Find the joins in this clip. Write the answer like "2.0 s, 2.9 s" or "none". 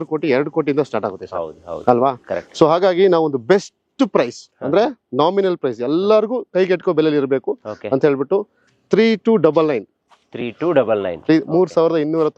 none